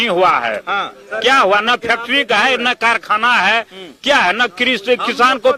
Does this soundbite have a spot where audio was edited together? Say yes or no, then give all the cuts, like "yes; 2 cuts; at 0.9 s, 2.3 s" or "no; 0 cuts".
no; 0 cuts